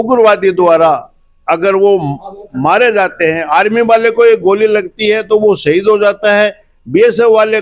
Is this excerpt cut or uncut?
uncut